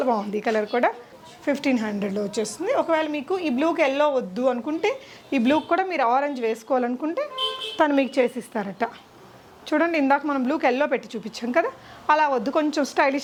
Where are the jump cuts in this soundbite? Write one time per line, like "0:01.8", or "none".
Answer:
none